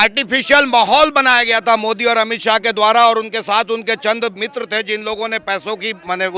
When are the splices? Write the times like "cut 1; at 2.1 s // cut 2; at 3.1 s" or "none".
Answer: none